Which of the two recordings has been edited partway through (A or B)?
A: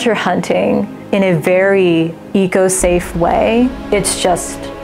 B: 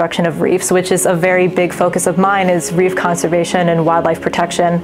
A